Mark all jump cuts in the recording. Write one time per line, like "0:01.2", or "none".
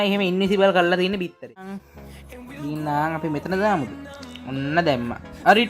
0:01.8